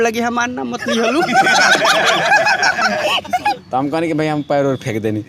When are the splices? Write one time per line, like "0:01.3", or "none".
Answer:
0:03.6